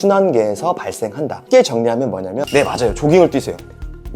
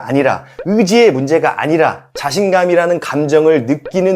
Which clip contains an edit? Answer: first; 1 cut; at 2.4 s

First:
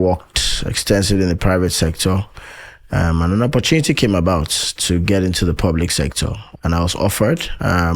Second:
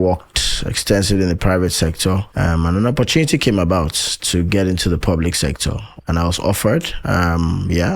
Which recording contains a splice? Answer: second; 1 cut; at 2.3 s

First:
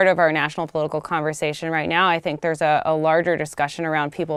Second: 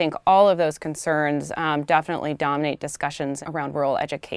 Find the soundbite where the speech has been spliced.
second; 1 cut; at 3.4 s

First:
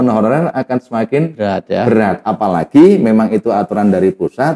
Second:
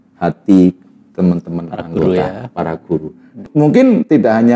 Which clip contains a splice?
second; 1 cut; at 3.5 s

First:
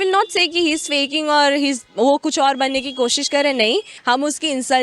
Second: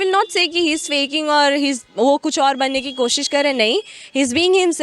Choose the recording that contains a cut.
first; 1 cut; at 3.9 s

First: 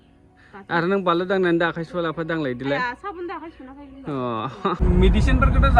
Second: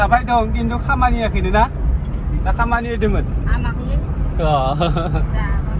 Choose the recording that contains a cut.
first; 1 cut; at 4.8 s

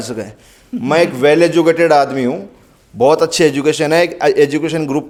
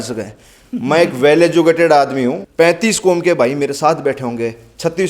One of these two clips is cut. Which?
second; 1 cut; at 2.4 s

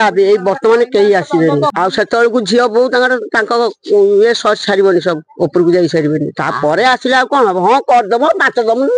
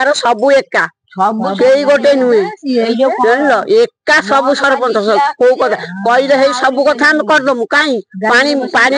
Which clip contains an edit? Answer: first; 1 cut; at 1.7 s

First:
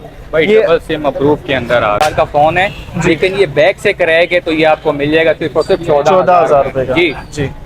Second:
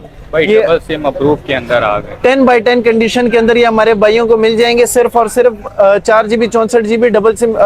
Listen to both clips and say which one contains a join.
first; 1 cut; at 2.0 s

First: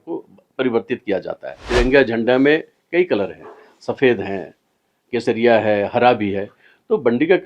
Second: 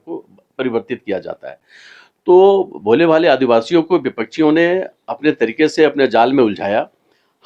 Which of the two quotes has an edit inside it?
first; 1 cut; at 1.6 s

